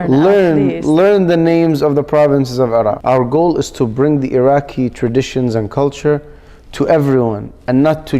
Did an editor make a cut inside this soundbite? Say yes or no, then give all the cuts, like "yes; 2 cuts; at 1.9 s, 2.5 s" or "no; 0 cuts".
yes; 1 cut; at 3.0 s